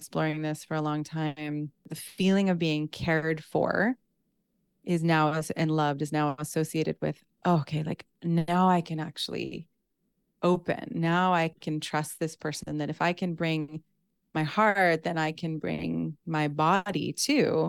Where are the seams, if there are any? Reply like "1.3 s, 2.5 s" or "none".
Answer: 2.0 s

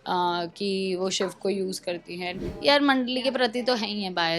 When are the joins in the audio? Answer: 2.6 s

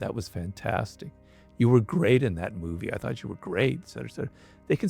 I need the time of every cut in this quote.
none

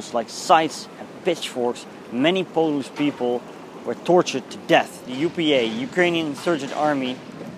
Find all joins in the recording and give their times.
5.0 s

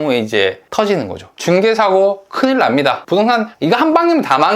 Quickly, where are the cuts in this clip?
1.3 s, 3.3 s

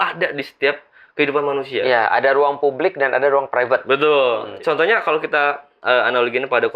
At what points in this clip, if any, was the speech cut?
4.5 s

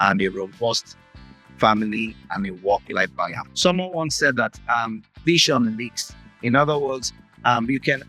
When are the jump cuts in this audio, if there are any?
3.4 s

